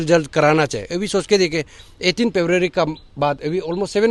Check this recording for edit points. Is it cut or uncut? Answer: uncut